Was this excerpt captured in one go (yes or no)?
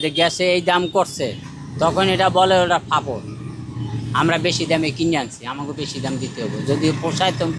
yes